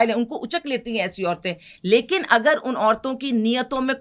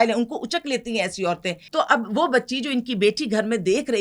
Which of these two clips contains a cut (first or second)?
second